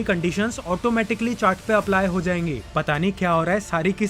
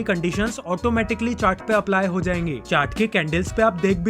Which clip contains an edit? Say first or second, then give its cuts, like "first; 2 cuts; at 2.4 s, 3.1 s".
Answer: first; 1 cut; at 2.6 s